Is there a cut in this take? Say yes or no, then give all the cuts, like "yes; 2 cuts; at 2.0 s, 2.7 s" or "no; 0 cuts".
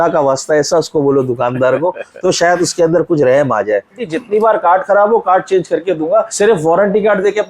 yes; 2 cuts; at 4.0 s, 6.3 s